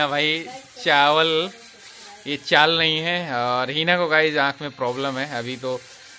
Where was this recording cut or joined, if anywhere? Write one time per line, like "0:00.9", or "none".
none